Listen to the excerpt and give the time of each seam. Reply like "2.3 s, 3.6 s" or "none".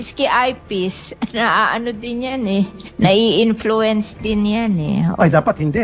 none